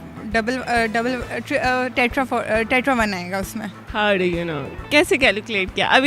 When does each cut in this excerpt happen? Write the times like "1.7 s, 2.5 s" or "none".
3.8 s